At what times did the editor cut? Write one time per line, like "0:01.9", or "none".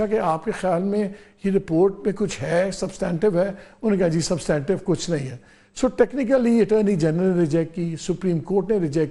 none